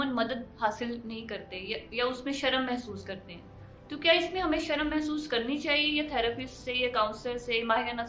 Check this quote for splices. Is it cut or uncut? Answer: uncut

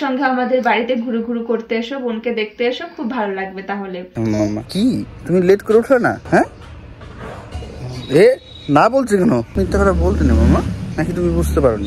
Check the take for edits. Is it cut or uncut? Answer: cut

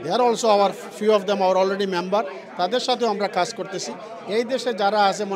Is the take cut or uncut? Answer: uncut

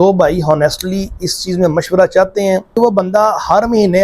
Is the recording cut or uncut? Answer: cut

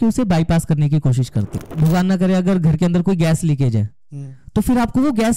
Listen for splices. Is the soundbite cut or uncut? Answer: cut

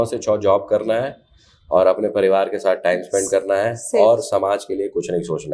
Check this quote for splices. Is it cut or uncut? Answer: uncut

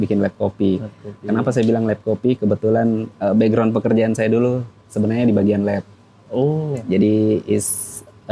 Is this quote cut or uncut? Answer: uncut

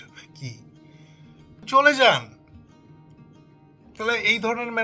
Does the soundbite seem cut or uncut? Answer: cut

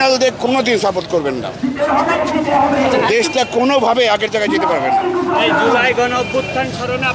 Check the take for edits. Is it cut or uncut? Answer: uncut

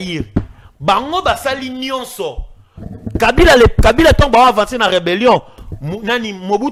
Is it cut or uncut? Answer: uncut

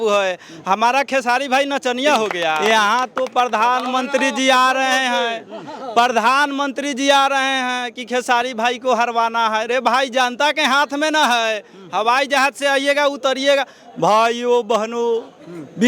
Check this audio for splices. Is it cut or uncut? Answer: cut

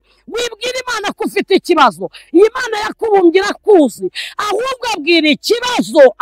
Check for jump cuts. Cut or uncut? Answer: uncut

